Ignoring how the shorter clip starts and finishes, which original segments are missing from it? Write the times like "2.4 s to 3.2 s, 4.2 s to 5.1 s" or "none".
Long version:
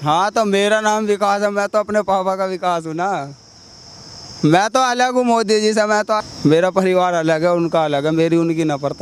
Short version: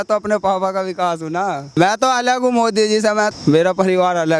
3.4 s to 4.5 s, 6.1 s to 6.3 s